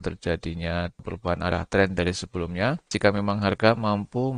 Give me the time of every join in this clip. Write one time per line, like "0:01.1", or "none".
0:01.0
0:02.9